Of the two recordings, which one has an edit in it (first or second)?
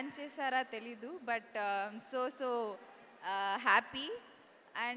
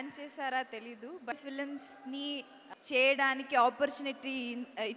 second